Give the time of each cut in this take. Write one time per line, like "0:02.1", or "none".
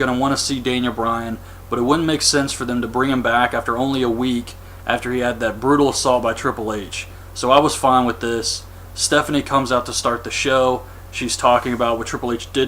0:09.9